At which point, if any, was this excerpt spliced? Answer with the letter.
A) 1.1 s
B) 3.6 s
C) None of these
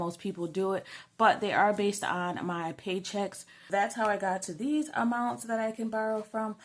B